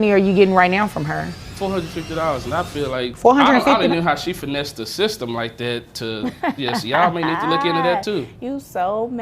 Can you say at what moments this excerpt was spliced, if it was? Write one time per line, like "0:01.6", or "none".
0:01.4
0:03.1

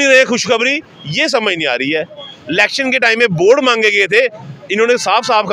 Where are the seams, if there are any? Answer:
0:02.3

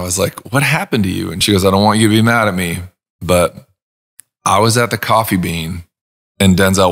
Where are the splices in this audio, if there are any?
0:01.4

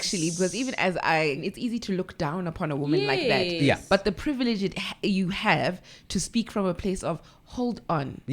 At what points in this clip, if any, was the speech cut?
0:01.4

